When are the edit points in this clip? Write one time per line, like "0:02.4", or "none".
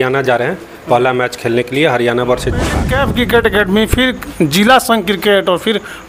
0:02.8